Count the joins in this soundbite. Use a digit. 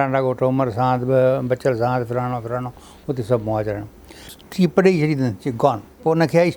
1